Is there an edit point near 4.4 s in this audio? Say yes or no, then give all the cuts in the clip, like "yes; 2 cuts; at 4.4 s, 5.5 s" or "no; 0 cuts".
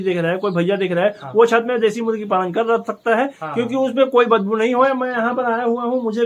no; 0 cuts